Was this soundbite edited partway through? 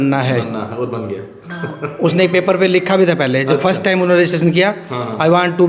no; 0 cuts

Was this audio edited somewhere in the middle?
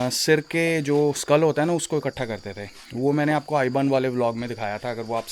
no; 0 cuts

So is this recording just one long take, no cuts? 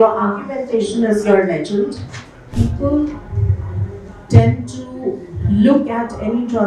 no; 1 cut; at 2.5 s

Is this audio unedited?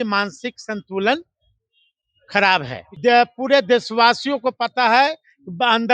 no; 1 cut; at 2.8 s

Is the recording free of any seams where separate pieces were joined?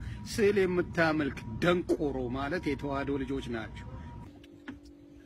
yes; 0 cuts

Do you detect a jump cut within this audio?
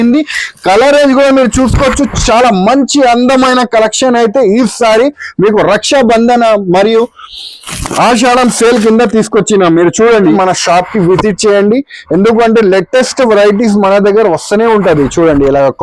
yes; 1 cut; at 10.3 s

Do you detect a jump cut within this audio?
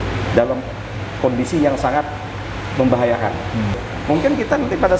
yes; 1 cut; at 3.8 s

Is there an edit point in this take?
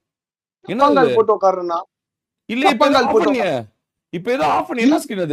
no; 0 cuts

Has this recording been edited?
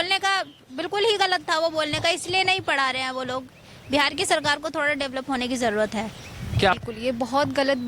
yes; 1 cut; at 6.7 s

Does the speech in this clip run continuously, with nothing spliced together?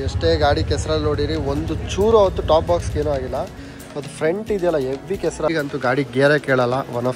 no; 1 cut; at 5.5 s

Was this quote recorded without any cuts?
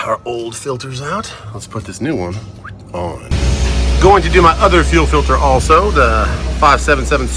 yes; 0 cuts

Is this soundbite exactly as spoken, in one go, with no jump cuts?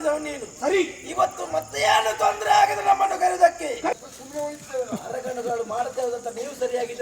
no; 1 cut; at 3.9 s

